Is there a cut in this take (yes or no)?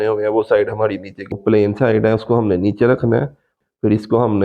yes